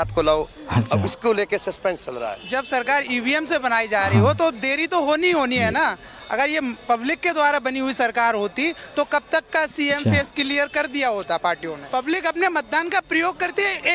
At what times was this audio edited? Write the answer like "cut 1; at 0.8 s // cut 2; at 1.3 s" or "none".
cut 1; at 2.3 s // cut 2; at 11.7 s